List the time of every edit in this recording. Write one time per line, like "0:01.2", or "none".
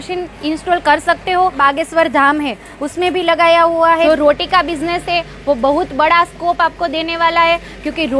0:01.6
0:04.1